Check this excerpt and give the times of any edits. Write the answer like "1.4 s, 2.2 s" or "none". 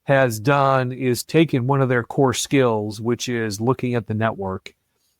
1.2 s